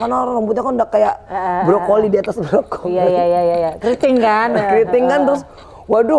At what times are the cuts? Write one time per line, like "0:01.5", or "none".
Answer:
none